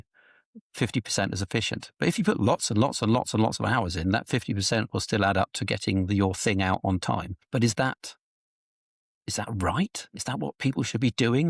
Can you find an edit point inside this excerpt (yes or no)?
yes